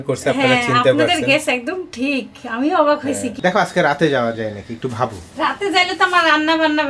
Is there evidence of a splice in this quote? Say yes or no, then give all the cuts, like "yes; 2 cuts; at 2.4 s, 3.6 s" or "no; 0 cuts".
yes; 1 cut; at 3.3 s